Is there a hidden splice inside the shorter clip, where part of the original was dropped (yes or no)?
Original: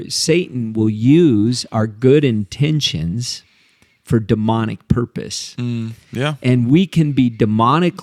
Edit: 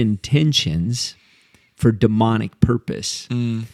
no